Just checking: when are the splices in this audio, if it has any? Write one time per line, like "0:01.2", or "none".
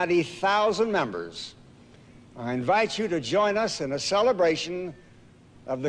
none